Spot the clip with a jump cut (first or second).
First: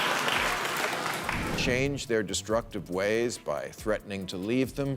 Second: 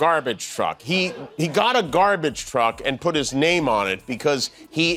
first